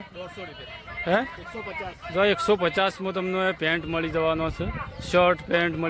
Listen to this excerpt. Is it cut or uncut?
uncut